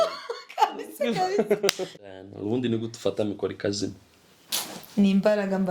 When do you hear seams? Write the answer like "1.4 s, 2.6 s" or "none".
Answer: 2.1 s

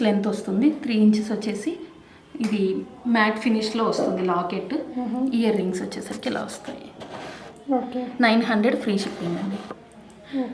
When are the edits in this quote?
none

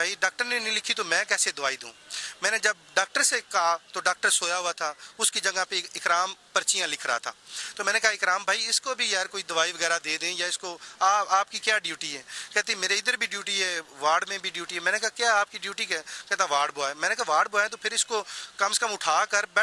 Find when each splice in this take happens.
none

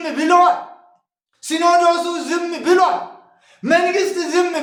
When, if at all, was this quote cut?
none

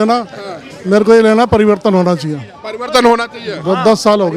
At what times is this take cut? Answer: none

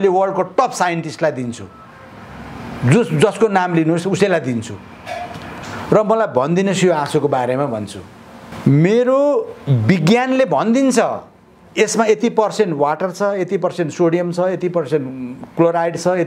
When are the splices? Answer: 8.5 s

